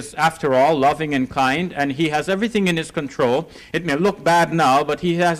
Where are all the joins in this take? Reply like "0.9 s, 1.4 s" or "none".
3.6 s